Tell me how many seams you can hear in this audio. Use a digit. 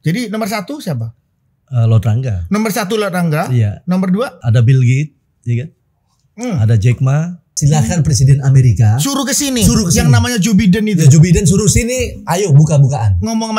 2